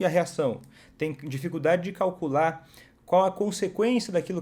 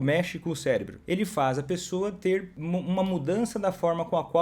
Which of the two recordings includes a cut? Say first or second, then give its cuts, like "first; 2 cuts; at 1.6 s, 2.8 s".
second; 2 cuts; at 0.9 s, 2.5 s